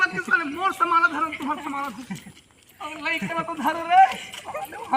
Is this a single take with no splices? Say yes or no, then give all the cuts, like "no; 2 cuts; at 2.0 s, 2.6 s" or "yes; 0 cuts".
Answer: yes; 0 cuts